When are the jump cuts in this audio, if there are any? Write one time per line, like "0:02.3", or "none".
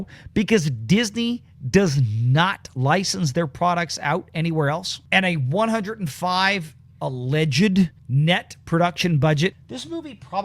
0:04.9
0:08.0
0:09.6